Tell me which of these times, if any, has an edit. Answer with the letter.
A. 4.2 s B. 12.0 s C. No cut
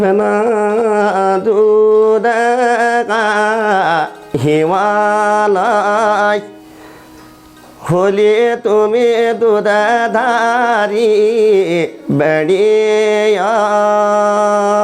C